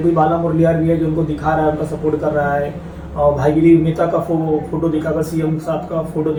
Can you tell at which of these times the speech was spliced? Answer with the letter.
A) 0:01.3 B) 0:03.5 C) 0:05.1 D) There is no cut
D